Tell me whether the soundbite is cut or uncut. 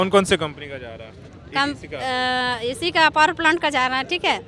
uncut